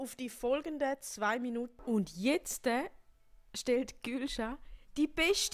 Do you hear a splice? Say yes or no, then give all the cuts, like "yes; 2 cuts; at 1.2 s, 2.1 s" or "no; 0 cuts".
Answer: yes; 1 cut; at 1.7 s